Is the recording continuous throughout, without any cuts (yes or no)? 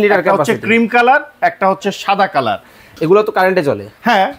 no